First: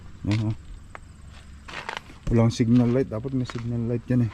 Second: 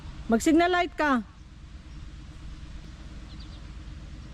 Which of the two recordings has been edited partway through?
second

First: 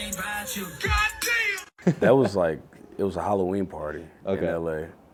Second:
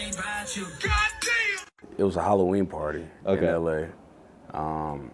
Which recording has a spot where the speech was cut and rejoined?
second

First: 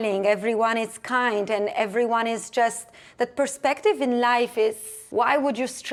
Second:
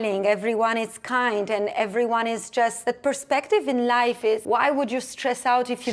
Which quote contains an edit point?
second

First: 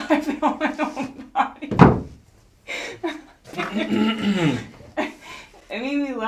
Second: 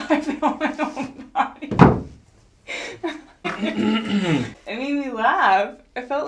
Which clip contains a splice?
second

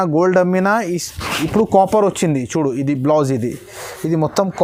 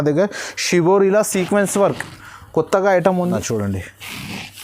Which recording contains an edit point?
second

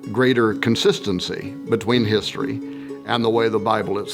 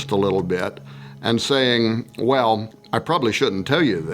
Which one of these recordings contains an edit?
second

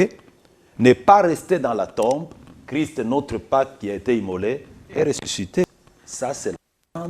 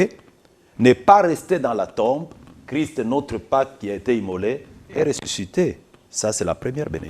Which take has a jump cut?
first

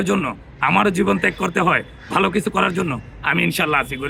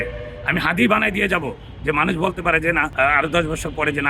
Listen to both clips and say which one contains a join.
second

